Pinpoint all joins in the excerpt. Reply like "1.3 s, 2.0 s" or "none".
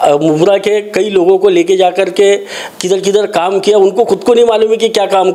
none